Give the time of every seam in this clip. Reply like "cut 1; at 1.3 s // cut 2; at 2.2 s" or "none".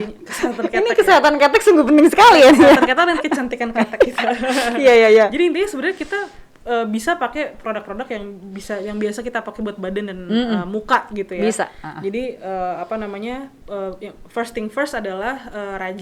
none